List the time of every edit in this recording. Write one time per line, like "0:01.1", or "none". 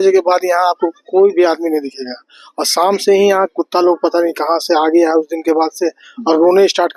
none